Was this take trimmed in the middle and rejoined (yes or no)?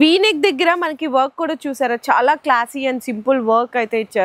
no